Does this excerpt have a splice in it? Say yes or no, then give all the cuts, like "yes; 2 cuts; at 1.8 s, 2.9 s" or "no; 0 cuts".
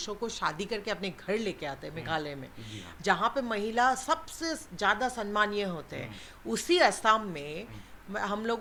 no; 0 cuts